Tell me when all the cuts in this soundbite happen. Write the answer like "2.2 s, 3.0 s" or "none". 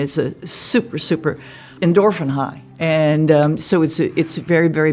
1.6 s